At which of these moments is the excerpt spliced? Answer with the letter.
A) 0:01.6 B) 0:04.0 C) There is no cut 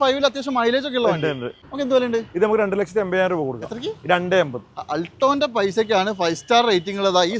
A